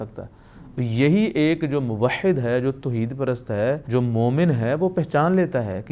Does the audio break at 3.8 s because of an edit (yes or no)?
yes